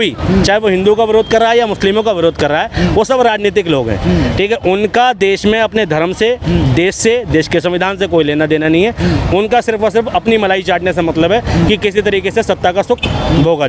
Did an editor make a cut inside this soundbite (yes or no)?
no